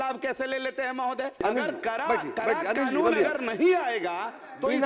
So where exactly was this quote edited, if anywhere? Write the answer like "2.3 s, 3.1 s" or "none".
1.4 s